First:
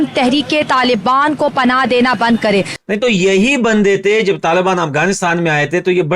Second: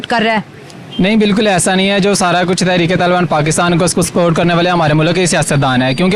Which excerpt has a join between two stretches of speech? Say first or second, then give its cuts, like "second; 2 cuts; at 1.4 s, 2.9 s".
first; 1 cut; at 2.8 s